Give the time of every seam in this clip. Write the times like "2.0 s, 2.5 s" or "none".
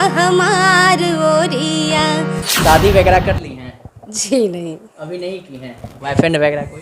2.4 s